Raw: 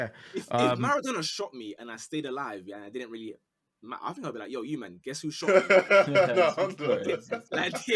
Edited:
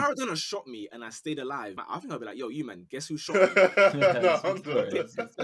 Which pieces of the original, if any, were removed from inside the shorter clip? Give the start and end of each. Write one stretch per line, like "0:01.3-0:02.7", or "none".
0:02.6-0:03.9